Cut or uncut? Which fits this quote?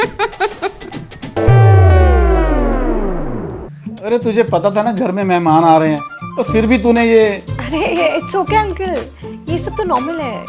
uncut